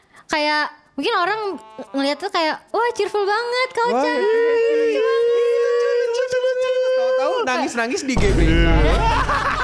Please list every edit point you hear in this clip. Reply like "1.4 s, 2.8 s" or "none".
none